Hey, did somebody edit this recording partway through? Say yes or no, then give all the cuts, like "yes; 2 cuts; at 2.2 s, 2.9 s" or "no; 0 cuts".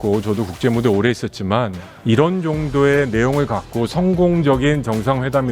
yes; 1 cut; at 1.9 s